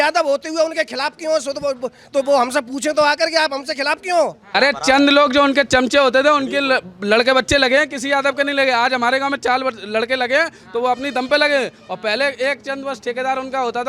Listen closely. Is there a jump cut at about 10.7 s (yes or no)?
no